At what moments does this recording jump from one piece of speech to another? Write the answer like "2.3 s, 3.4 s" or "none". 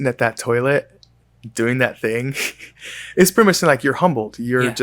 none